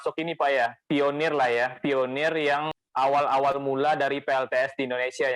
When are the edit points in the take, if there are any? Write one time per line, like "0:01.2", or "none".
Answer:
0:02.7